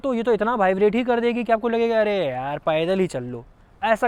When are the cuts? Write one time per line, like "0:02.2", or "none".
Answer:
none